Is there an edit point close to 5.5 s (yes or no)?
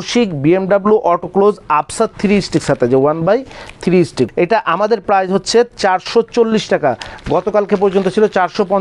no